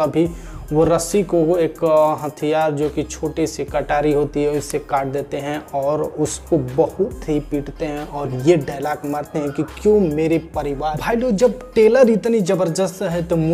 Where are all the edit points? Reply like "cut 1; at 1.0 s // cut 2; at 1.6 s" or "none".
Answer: cut 1; at 11.0 s